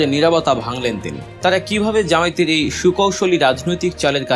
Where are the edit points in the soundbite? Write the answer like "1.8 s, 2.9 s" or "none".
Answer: 1.3 s